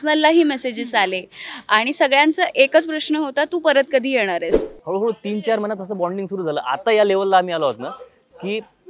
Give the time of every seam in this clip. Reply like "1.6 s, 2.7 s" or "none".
4.6 s